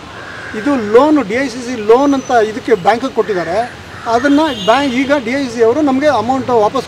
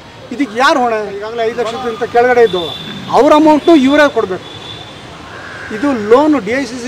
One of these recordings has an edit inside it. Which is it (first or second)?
second